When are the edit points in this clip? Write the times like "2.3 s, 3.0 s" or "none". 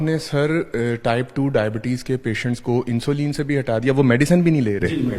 none